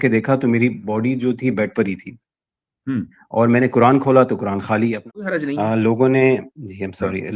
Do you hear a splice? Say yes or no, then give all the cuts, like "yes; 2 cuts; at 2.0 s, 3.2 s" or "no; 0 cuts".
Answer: yes; 1 cut; at 5.3 s